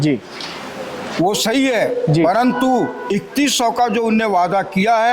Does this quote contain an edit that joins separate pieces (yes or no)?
no